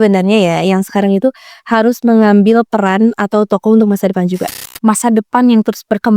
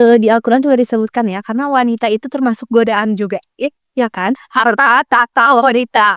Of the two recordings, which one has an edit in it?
first; 1 cut; at 4.5 s

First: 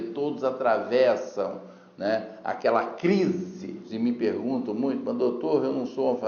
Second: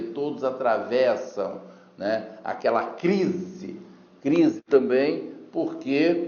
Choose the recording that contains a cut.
first; 1 cut; at 3.8 s

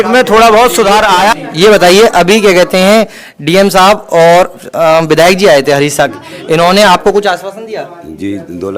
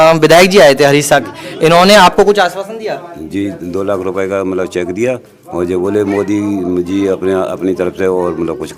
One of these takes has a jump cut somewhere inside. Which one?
first; 1 cut; at 1.3 s

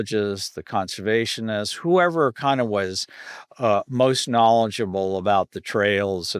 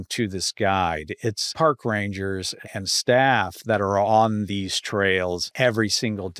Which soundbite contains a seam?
second; 3 cuts; at 1.4 s, 2.6 s, 5.5 s

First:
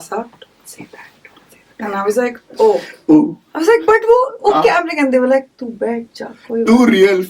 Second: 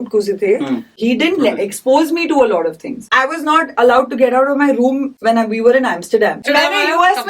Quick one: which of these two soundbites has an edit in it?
second; 4 cuts; at 1.0 s, 3.0 s, 5.1 s, 6.4 s

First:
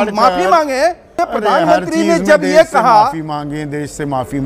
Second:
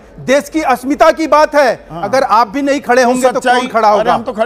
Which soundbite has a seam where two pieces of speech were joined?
first; 1 cut; at 1.1 s

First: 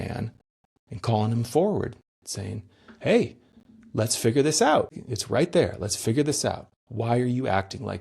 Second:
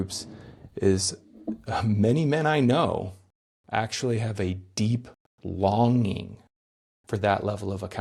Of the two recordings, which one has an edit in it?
first; 1 cut; at 5.0 s

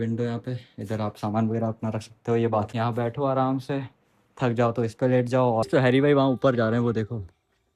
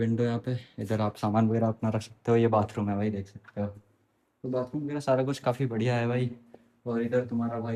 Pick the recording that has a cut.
first; 2 cuts; at 2.7 s, 5.7 s

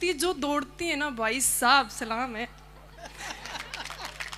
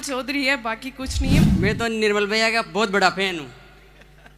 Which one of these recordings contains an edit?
second; 1 cut; at 1.4 s

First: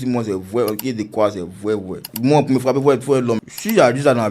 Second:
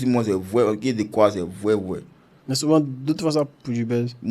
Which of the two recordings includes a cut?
first; 1 cut; at 2.1 s

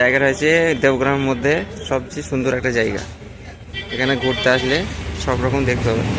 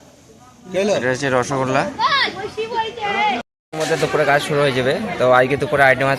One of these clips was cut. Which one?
second; 1 cut; at 3.4 s

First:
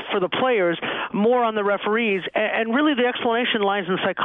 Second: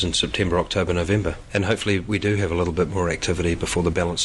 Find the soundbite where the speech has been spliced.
second; 1 cut; at 1.4 s

